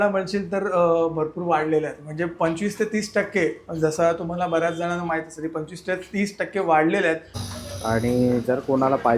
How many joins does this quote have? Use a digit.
1